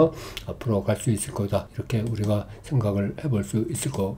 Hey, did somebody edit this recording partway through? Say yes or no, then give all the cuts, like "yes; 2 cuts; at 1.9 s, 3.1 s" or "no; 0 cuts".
no; 0 cuts